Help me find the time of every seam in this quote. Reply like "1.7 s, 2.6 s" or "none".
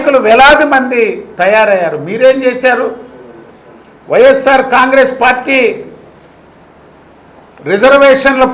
none